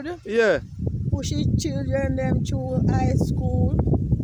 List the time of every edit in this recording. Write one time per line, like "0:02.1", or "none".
none